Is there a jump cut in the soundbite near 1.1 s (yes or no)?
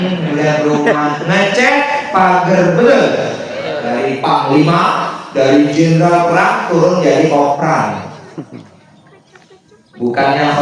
no